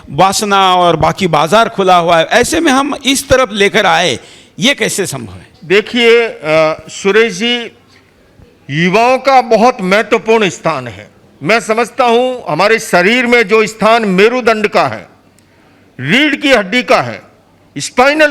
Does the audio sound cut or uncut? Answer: uncut